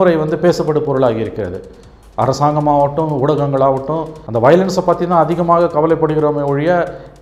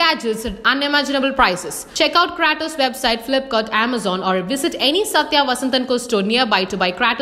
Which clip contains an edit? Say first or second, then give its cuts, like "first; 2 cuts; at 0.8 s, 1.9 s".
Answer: first; 1 cut; at 4.2 s